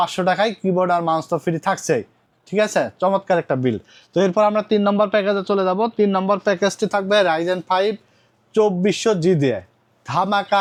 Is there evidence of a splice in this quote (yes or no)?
no